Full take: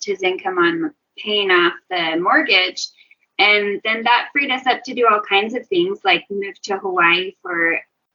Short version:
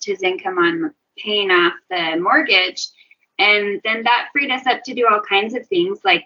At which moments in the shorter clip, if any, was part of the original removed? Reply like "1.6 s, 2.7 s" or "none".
none